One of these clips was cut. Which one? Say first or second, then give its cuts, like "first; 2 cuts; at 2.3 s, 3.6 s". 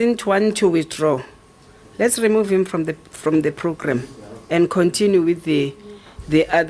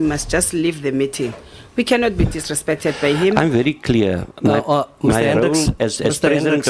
second; 1 cut; at 3.3 s